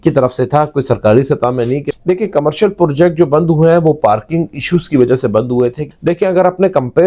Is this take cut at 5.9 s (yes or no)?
yes